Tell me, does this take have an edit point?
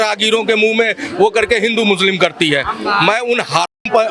no; 0 cuts

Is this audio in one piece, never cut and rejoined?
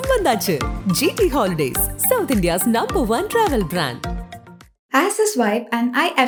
yes; 0 cuts

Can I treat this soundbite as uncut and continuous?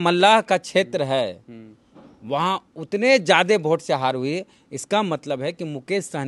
yes; 0 cuts

